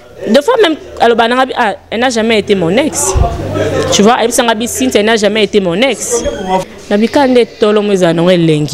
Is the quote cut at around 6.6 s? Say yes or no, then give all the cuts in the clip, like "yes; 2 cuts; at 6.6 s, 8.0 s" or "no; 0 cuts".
yes; 1 cut; at 6.6 s